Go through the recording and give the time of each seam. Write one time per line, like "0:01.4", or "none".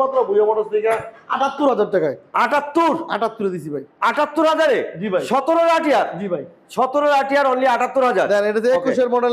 none